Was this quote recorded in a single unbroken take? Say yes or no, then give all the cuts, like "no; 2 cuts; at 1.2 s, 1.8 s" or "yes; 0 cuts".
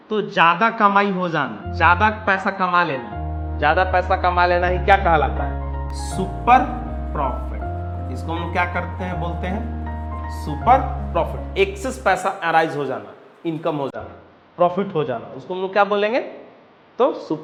yes; 0 cuts